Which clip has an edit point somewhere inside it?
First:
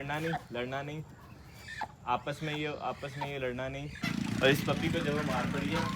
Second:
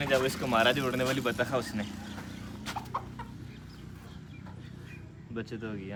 first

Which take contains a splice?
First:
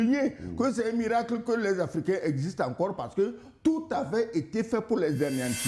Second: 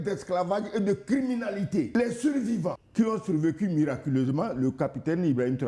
second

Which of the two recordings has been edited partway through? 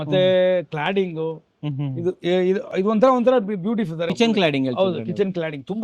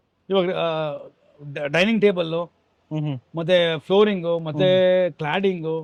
first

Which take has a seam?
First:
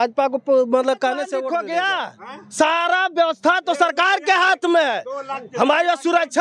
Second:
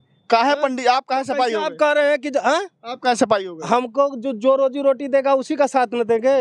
first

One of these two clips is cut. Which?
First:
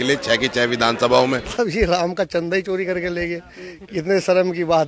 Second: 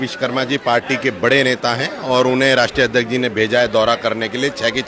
first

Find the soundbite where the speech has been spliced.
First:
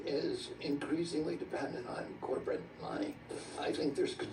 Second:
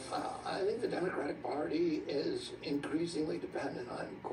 first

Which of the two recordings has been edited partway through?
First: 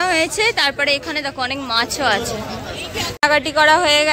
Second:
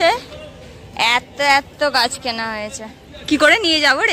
first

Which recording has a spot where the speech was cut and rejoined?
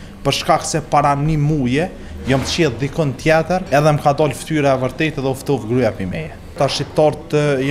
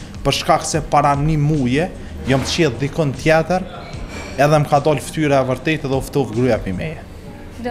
first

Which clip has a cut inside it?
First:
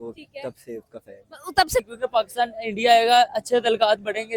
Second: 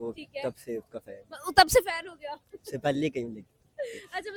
first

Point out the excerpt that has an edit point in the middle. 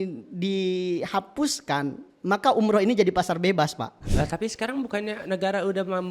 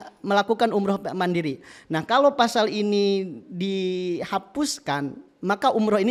first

